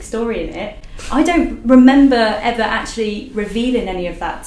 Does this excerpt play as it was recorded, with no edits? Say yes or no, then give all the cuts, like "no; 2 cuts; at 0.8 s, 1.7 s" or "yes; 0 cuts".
yes; 0 cuts